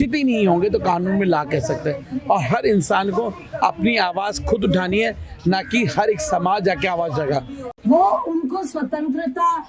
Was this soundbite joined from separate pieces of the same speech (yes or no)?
yes